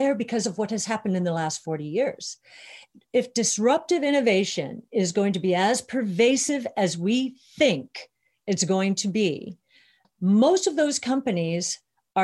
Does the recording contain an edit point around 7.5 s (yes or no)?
no